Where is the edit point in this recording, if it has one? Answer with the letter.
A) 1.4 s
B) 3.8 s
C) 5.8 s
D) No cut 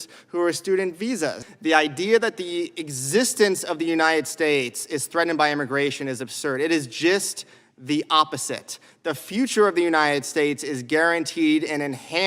A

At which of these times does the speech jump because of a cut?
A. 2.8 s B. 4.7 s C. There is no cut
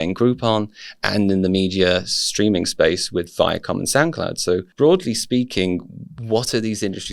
B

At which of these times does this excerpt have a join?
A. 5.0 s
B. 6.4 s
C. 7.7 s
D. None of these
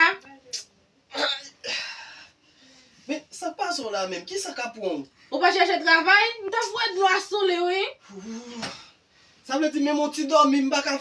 B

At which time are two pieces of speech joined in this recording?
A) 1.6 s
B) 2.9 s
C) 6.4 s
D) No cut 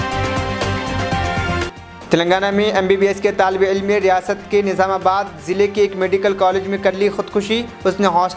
A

